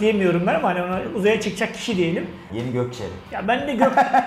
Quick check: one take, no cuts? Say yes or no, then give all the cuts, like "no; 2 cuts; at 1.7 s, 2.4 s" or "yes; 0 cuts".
no; 1 cut; at 2.5 s